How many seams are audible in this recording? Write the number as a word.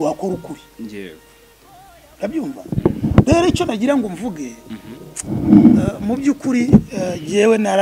zero